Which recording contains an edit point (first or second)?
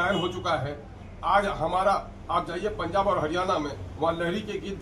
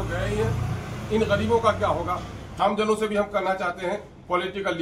second